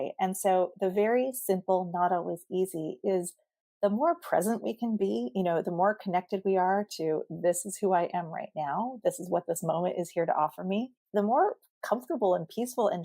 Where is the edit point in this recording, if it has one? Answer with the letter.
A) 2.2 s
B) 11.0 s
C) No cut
B